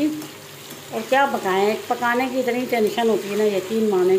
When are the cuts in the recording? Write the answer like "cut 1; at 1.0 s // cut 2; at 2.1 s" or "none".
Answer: none